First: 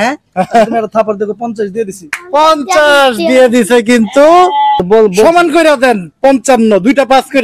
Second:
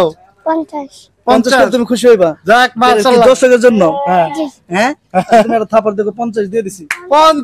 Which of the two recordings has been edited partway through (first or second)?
first